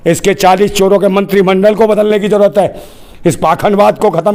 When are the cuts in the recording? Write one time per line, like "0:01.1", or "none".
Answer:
none